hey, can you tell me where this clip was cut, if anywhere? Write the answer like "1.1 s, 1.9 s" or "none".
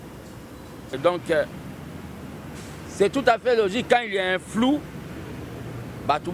1.0 s